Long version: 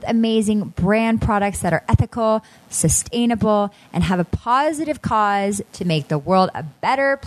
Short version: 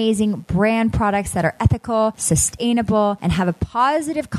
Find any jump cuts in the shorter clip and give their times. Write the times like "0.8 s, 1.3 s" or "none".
2.2 s, 3.2 s